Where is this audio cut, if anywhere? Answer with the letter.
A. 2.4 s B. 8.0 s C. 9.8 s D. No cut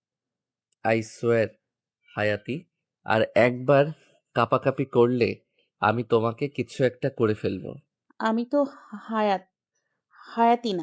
B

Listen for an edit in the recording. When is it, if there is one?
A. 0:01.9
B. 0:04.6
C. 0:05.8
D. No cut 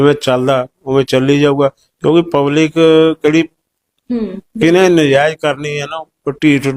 A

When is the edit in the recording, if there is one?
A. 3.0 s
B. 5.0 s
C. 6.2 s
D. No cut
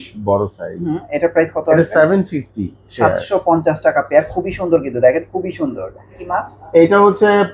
C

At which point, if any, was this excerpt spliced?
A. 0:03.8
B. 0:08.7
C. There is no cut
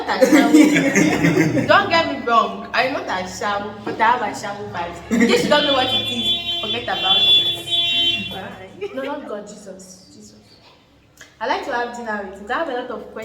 B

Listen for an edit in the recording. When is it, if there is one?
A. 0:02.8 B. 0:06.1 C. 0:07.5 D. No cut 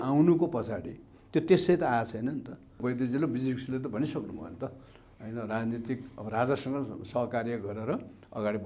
A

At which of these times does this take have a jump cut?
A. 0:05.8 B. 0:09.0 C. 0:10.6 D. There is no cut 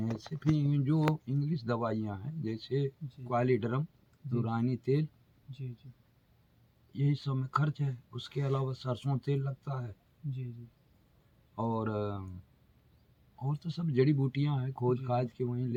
D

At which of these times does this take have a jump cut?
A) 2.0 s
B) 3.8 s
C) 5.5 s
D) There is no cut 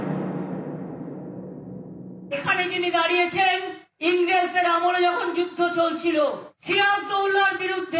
A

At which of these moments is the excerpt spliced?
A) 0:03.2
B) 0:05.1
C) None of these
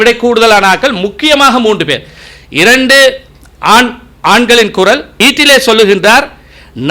B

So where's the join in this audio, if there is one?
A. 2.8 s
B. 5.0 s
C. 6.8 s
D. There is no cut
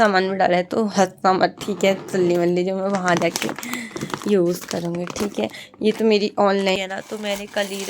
C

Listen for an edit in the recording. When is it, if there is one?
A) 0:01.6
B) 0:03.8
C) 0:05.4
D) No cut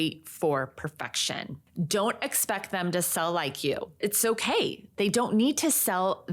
A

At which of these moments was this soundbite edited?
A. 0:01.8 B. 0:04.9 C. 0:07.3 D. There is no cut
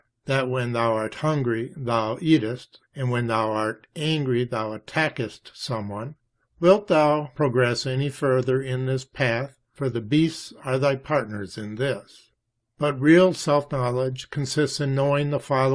A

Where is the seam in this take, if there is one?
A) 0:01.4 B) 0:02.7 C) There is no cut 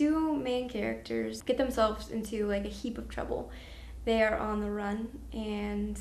A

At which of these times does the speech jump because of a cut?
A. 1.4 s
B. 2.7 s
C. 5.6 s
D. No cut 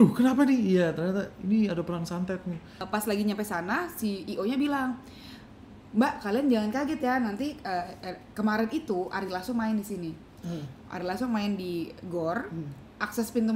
B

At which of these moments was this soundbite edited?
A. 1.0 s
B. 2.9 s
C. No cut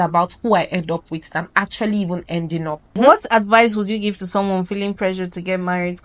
B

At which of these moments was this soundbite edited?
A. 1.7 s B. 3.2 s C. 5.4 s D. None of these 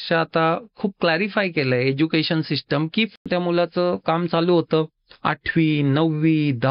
B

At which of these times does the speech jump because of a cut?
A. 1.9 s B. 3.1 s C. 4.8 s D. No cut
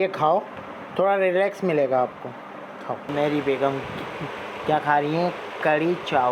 B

